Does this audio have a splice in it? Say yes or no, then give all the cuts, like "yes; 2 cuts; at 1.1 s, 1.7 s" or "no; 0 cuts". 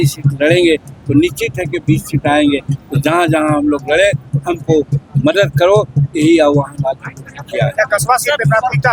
no; 0 cuts